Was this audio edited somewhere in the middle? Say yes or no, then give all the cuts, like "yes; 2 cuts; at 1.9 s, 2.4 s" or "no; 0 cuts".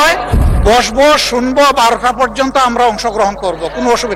no; 0 cuts